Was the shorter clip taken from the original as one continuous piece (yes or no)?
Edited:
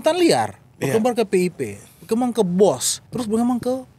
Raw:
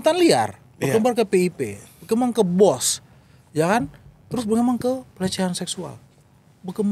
no